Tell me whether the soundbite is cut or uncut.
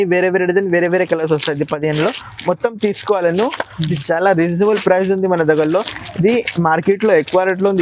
uncut